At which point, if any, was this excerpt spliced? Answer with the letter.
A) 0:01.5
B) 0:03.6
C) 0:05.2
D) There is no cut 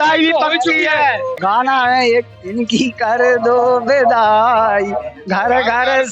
A